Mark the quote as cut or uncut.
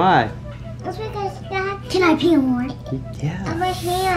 uncut